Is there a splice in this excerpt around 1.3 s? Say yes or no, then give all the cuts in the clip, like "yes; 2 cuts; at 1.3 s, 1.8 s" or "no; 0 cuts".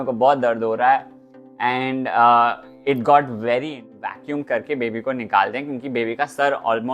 no; 1 cut; at 3.9 s